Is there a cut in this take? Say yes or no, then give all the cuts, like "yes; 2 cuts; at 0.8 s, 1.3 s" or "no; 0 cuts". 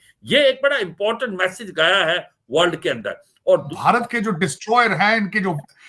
yes; 1 cut; at 3.7 s